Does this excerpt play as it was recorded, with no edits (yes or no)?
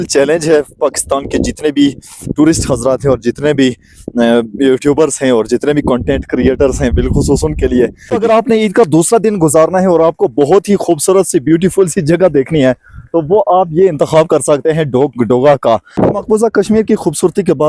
no